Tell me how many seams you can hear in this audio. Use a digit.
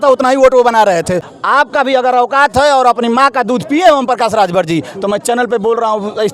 1